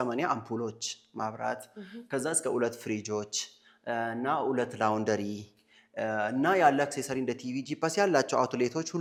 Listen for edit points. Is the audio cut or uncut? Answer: uncut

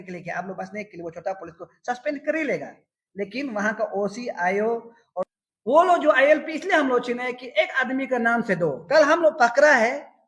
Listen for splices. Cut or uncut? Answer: cut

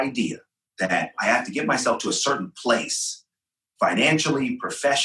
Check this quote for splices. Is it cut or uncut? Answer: cut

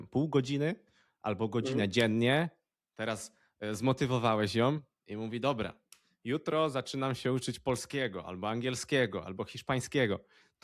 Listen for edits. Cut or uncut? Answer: uncut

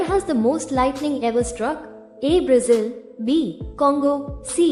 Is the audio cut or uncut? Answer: uncut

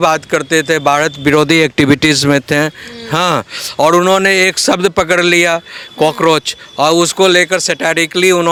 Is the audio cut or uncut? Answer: uncut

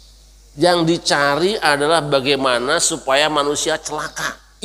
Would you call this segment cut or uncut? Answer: uncut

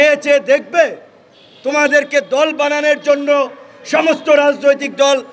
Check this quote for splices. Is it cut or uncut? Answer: uncut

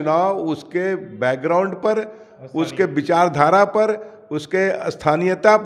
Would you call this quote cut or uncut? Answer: uncut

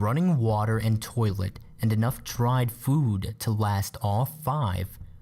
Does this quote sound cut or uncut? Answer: uncut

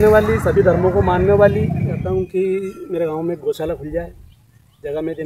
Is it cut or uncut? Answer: cut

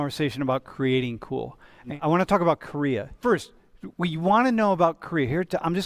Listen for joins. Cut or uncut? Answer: cut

